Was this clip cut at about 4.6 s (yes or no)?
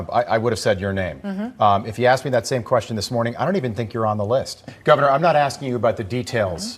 yes